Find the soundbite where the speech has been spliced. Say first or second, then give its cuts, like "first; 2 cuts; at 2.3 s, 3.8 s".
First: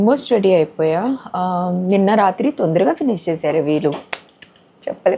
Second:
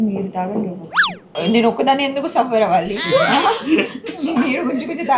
second; 1 cut; at 1.3 s